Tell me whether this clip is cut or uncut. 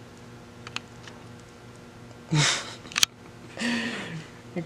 uncut